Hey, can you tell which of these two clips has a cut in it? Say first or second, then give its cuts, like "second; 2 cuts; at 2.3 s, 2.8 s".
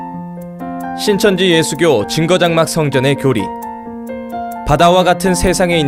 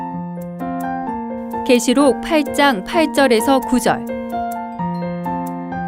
second; 1 cut; at 1.0 s